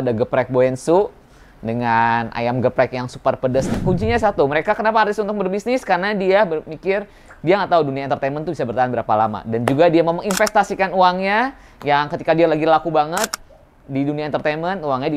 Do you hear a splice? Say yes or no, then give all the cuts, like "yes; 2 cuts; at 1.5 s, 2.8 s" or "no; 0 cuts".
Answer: yes; 1 cut; at 3.7 s